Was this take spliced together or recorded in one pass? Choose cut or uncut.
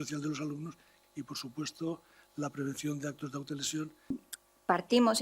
cut